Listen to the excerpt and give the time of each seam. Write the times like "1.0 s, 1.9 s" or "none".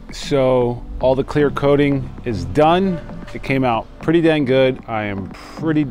none